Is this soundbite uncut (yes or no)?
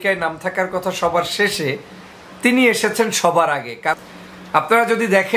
no